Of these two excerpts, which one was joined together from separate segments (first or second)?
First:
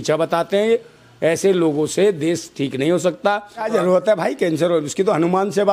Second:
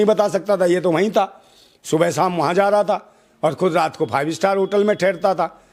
first